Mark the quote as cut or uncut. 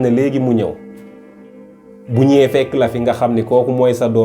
uncut